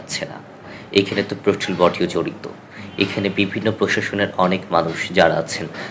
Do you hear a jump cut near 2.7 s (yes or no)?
no